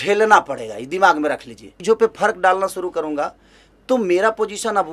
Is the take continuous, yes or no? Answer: no